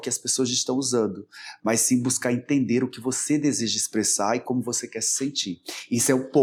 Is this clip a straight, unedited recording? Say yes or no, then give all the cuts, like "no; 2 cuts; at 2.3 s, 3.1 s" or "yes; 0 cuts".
yes; 0 cuts